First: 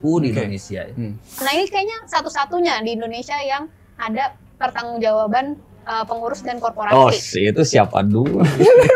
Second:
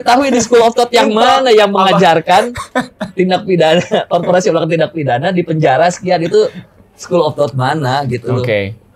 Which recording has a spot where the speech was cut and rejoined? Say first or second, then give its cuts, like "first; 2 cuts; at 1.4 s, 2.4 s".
first; 1 cut; at 1.4 s